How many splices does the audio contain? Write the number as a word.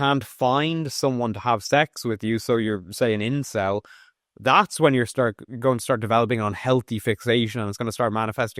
zero